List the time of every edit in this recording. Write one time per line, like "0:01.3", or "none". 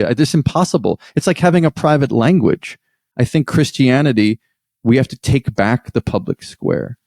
0:03.1